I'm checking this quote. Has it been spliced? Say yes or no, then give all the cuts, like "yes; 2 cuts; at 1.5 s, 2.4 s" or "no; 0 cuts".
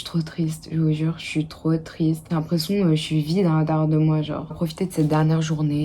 yes; 2 cuts; at 2.2 s, 4.5 s